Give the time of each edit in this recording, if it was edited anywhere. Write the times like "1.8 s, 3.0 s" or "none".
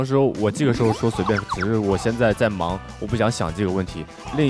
none